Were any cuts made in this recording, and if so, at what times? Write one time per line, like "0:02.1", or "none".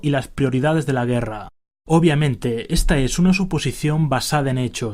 0:03.9